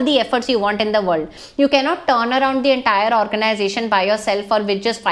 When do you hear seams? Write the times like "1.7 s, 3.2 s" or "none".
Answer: 1.4 s